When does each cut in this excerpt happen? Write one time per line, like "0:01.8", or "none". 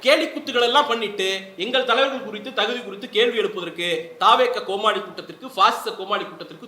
none